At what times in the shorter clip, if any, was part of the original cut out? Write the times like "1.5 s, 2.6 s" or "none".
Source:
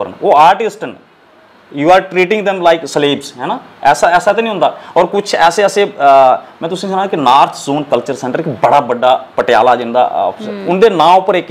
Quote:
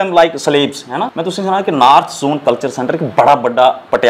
1.1 s